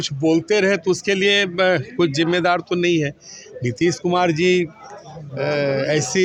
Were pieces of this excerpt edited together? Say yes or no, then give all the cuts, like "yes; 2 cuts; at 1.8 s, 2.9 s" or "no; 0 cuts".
no; 0 cuts